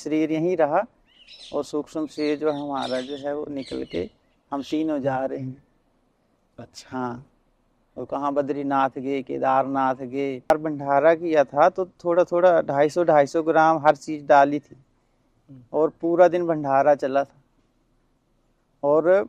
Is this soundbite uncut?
no; 1 cut; at 10.5 s

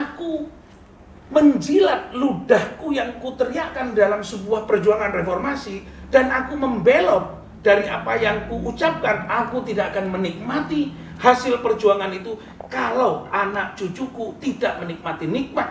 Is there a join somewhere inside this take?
no; 0 cuts

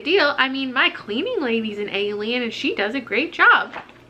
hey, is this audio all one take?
yes; 0 cuts

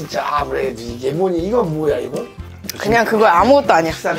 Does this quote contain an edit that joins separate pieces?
yes; 1 cut; at 2.4 s

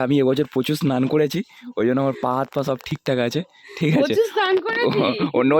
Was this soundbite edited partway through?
no; 0 cuts

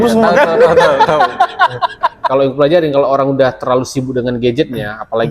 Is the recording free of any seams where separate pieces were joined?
no; 1 cut; at 2.2 s

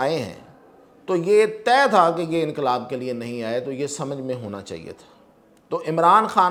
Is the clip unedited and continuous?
yes; 0 cuts

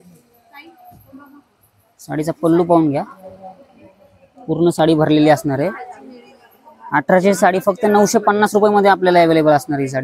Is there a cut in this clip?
no; 0 cuts

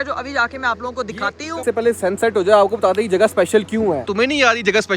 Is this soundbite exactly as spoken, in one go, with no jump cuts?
no; 2 cuts; at 1.6 s, 4.1 s

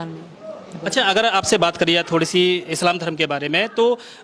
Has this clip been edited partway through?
no; 0 cuts

